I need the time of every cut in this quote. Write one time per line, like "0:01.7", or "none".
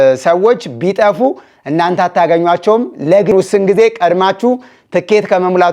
0:03.3